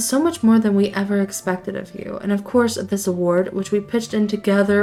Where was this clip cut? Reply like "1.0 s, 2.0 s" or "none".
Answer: none